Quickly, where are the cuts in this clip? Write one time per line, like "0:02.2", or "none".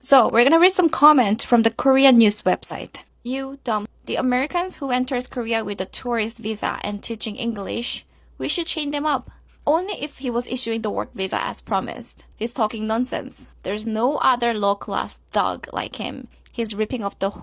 0:03.8
0:08.2